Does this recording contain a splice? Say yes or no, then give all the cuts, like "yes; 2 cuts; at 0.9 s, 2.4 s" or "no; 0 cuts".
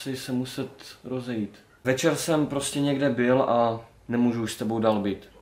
yes; 1 cut; at 1.7 s